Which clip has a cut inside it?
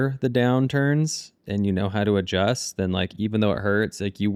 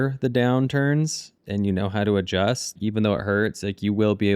second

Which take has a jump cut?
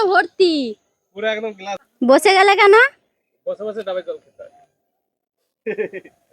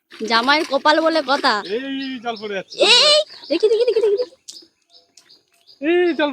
first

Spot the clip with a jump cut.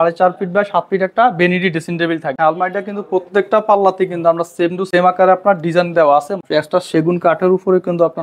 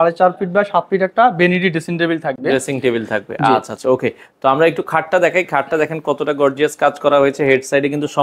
first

